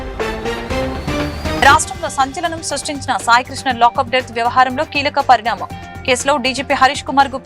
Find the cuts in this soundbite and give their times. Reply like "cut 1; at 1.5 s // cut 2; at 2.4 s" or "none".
cut 1; at 1.6 s